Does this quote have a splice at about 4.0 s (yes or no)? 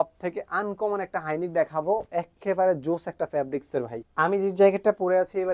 yes